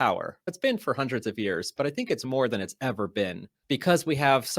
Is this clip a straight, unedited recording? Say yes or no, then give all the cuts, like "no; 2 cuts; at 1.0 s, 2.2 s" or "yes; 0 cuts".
no; 1 cut; at 3.5 s